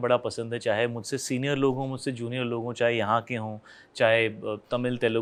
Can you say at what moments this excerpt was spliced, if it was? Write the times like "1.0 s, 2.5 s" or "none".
none